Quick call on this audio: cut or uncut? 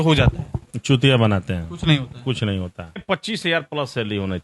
cut